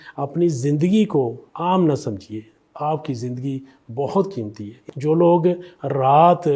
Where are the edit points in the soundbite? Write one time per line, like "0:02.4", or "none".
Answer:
0:01.4
0:04.9